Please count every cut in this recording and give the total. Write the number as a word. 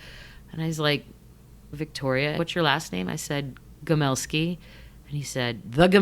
one